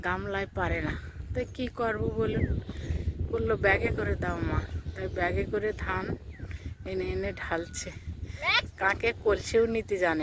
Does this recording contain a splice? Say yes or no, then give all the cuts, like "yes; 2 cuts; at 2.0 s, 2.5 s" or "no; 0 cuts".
no; 0 cuts